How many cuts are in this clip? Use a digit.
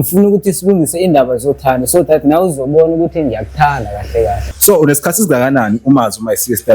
1